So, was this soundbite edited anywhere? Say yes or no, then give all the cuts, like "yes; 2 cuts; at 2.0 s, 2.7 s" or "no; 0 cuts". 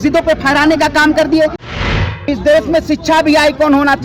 yes; 1 cut; at 1.8 s